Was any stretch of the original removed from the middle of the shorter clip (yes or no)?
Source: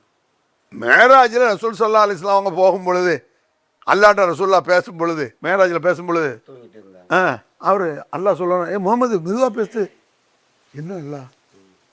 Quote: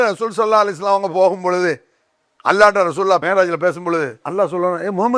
yes